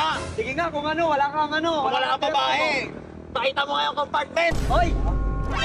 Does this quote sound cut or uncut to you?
uncut